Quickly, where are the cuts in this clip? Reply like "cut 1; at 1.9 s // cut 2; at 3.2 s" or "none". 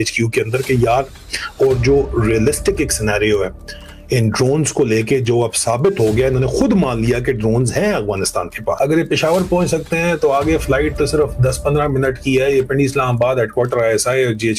cut 1; at 8.8 s